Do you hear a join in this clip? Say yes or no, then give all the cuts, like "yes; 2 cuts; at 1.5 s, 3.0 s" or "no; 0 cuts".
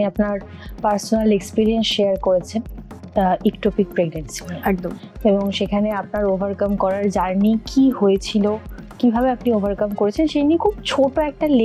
no; 0 cuts